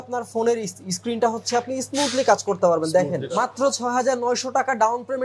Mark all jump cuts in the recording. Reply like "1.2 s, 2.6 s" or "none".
3.2 s